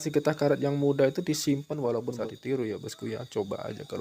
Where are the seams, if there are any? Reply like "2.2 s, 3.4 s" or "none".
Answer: 2.1 s